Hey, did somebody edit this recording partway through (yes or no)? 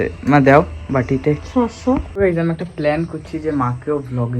yes